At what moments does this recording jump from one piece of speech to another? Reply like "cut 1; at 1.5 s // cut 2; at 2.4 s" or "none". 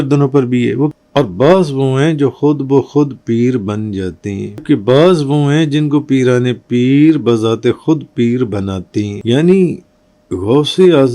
cut 1; at 0.9 s // cut 2; at 4.6 s // cut 3; at 9.1 s